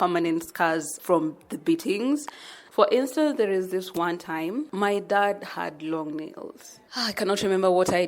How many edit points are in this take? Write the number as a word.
three